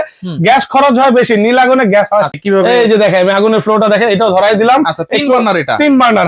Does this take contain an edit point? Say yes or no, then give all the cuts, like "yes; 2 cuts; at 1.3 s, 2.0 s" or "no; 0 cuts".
yes; 1 cut; at 2.3 s